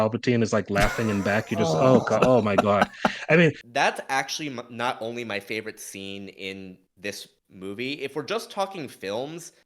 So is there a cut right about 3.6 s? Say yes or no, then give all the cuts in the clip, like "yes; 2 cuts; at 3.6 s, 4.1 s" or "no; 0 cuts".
yes; 1 cut; at 3.6 s